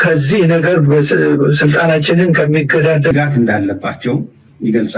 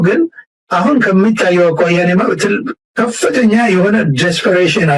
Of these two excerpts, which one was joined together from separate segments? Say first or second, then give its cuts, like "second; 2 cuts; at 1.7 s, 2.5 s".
first; 1 cut; at 3.1 s